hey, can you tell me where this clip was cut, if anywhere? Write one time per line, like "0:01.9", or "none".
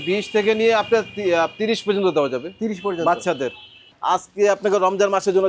0:03.9

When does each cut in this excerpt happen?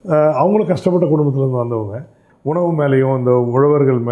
0:02.3

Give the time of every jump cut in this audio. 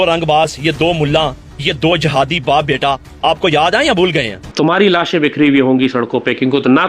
0:04.4

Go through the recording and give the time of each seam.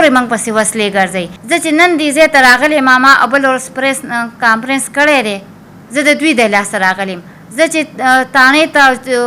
0:01.3

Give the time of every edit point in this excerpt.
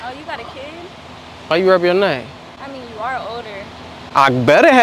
none

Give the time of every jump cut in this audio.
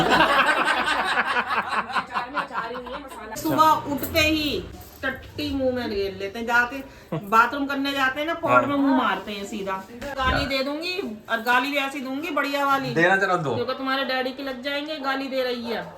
0:03.4
0:04.8
0:10.1

